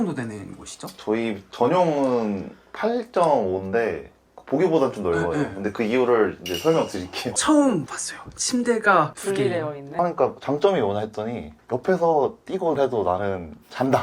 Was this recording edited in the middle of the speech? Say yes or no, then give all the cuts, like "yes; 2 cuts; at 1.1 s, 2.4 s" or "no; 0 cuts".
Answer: yes; 2 cuts; at 7.3 s, 10.0 s